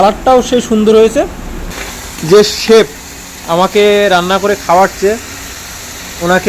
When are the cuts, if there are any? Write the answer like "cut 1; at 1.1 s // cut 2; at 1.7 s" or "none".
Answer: cut 1; at 1.6 s